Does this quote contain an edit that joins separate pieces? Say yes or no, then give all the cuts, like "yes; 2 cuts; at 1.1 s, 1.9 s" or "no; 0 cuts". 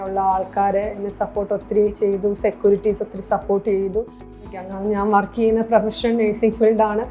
yes; 1 cut; at 4.6 s